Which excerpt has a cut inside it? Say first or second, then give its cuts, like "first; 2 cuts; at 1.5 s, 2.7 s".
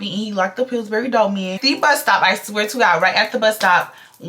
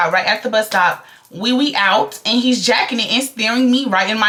first; 1 cut; at 1.5 s